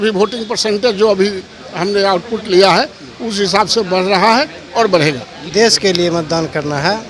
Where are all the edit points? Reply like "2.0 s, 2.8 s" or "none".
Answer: 5.3 s